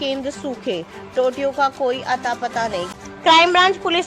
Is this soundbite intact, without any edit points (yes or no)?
no